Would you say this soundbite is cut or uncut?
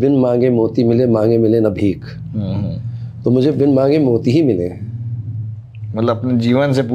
uncut